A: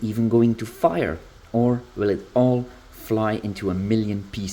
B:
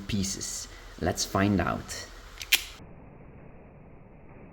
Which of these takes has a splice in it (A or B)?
B